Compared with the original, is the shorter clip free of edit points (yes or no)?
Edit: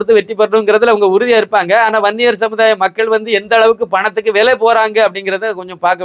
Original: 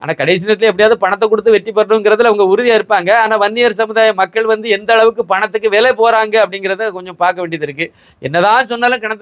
yes